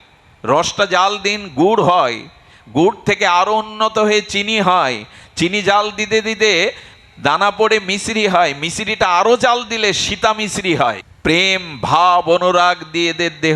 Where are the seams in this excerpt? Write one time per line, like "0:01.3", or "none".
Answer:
0:11.1